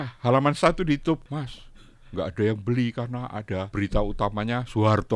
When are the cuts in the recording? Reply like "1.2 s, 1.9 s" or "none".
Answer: 1.3 s, 3.7 s